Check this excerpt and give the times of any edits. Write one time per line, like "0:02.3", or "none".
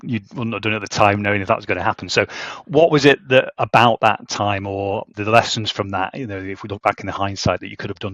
0:05.1